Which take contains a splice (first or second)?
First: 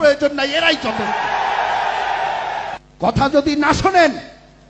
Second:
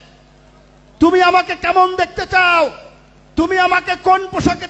first